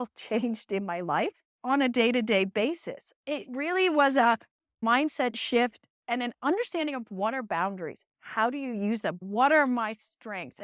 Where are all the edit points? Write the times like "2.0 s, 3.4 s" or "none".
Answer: 9.2 s